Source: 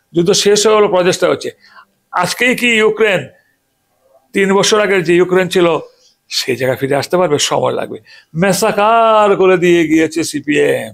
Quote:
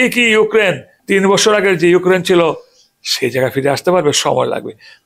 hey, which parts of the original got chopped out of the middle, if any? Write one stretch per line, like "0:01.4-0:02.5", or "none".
0:03.4-0:04.2

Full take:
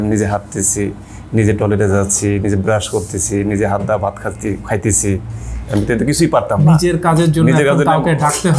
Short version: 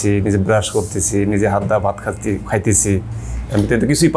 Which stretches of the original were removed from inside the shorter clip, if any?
none

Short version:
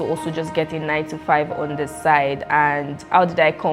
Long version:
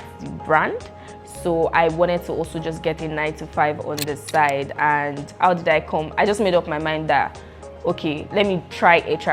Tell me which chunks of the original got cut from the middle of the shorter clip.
none

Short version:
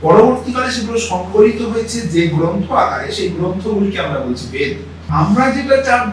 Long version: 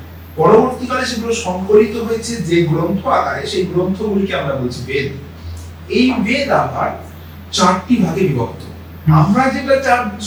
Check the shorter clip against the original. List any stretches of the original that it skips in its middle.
0:05.5-0:09.2

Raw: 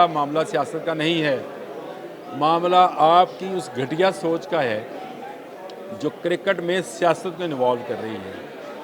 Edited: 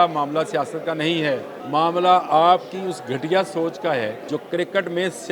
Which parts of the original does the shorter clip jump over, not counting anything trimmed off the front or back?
0:01.5-0:02.2
0:04.9-0:05.9

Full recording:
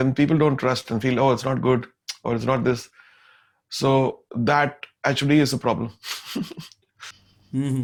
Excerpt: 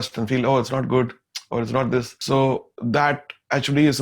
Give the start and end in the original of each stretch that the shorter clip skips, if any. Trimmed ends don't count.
0:02.9-0:03.7

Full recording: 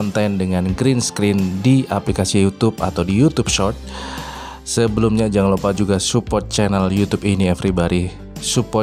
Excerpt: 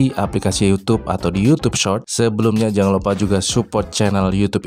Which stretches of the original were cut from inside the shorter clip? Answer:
0:03.8-0:04.6

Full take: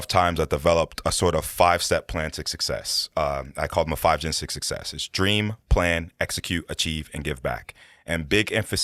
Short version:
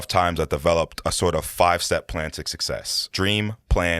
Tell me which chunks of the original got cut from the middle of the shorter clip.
0:03.0-0:05.0

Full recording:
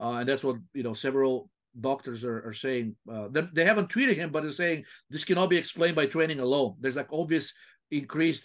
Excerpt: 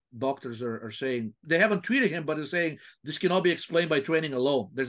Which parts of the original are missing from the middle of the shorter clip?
0:03.1-0:03.5

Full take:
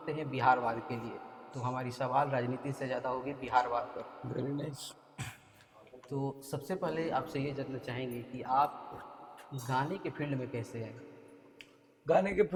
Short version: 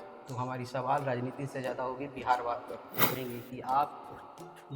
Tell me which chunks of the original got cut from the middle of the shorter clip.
0:04.4-0:08.0

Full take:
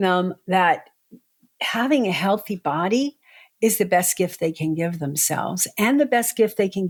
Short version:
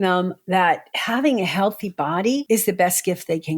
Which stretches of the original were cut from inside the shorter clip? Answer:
0:00.9-0:01.6
0:03.1-0:03.6

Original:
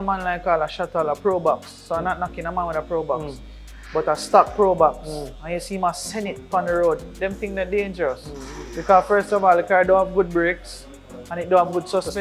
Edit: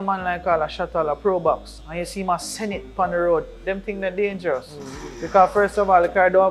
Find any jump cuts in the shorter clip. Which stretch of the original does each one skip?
0:01.7-0:05.3

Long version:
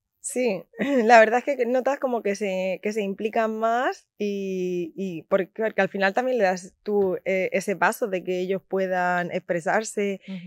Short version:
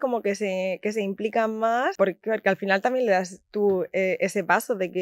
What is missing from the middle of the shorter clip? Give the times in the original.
0:03.9-0:05.3

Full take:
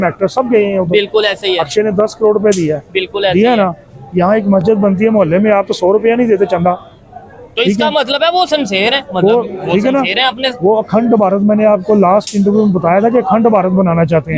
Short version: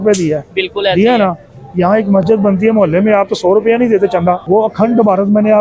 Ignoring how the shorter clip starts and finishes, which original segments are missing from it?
0:06.8-0:10.6

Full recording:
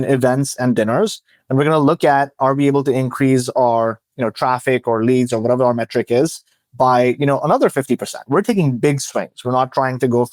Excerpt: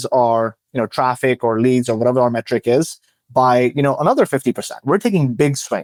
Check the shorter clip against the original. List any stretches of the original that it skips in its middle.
none

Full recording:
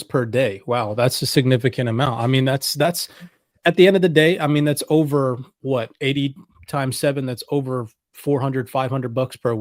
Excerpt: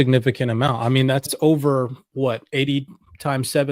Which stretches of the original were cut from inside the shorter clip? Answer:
0:02.7-0:04.8

